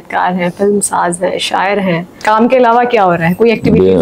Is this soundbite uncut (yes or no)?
no